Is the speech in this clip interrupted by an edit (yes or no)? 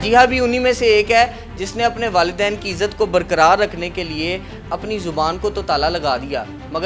no